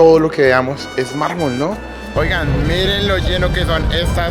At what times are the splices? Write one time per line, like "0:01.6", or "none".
0:02.1